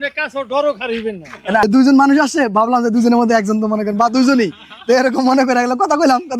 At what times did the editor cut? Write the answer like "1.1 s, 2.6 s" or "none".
none

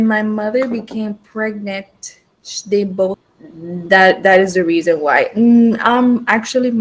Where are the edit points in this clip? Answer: 3.2 s

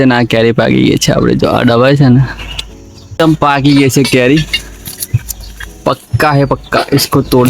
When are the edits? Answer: 3.2 s

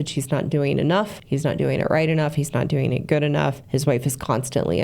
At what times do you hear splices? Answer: 1.1 s, 3.6 s

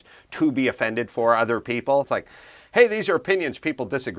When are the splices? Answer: 2.1 s

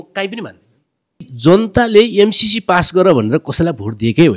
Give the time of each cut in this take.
1.3 s

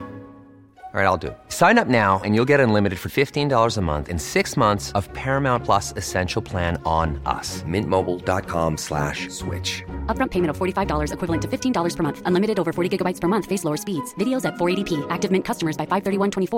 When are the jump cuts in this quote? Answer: none

